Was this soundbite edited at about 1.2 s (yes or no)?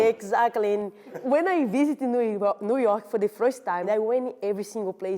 yes